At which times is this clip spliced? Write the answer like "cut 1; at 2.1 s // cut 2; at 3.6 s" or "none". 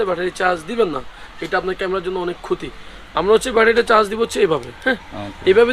none